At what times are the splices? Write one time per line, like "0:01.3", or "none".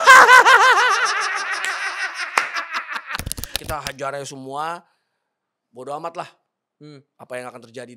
0:03.6